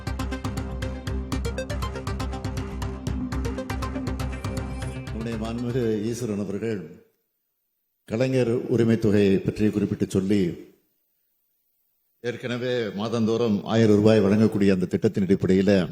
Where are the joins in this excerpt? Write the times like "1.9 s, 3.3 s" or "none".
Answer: 5.1 s